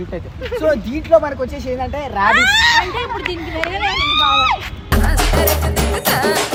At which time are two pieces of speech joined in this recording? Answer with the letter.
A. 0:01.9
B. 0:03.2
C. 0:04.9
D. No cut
D